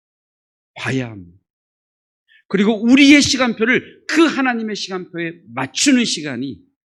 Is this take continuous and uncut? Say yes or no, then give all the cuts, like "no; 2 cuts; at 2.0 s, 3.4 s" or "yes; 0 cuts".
yes; 0 cuts